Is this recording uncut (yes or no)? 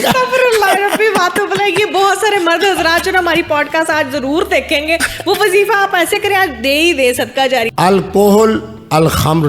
no